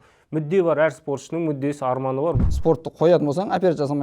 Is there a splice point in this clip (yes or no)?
yes